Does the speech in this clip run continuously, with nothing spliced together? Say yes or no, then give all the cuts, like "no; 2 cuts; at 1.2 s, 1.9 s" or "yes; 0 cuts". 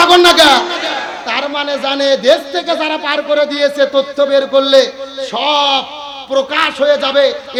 yes; 0 cuts